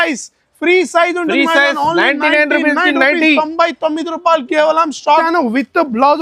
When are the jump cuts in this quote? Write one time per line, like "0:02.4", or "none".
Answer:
0:05.2